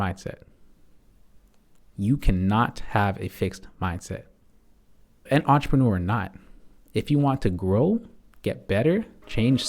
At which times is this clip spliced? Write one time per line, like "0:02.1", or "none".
0:05.2